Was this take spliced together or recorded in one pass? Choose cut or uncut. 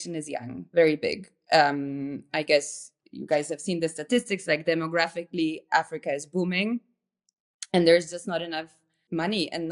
uncut